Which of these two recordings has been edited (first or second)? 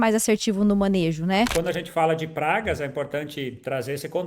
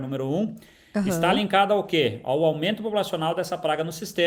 first